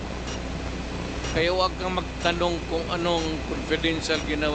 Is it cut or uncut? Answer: uncut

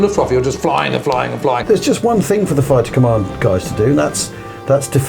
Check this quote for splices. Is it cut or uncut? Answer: cut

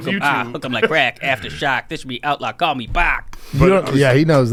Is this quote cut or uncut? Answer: uncut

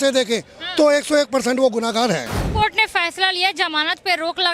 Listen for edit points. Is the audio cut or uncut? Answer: cut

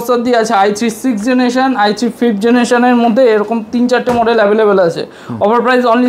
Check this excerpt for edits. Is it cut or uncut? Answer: uncut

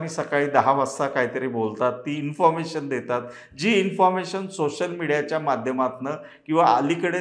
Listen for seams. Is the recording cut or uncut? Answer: uncut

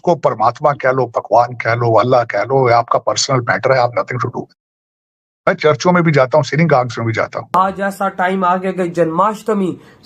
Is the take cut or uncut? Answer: cut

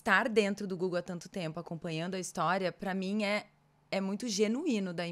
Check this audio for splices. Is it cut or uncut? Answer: uncut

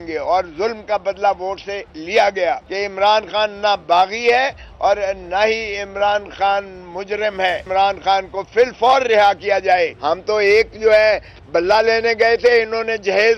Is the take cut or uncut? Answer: cut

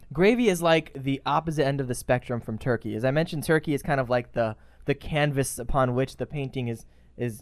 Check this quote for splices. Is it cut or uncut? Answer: cut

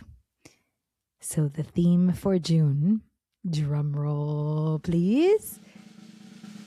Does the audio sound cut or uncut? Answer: cut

